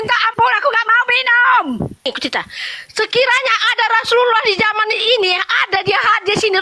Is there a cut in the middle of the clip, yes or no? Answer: yes